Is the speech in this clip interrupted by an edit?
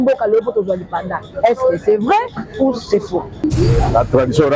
yes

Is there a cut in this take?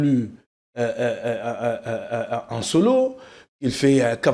no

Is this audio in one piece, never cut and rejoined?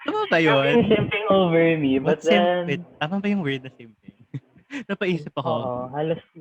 yes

